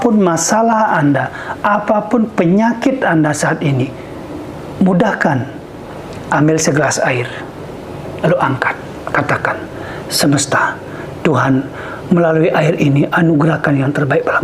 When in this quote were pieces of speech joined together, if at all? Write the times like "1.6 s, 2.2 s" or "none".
none